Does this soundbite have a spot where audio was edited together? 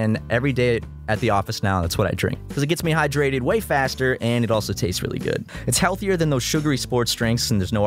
yes; 1 cut; at 5.6 s

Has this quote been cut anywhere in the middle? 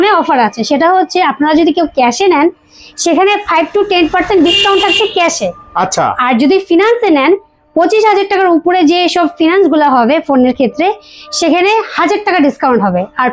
no; 0 cuts

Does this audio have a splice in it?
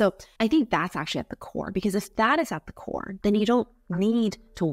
yes; 1 cut; at 3.1 s

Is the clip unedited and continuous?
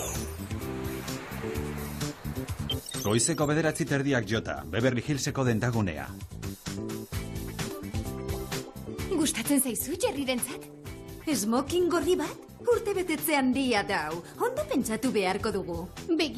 yes; 0 cuts

